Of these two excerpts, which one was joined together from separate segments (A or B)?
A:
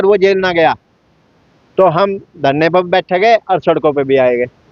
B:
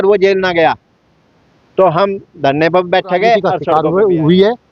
B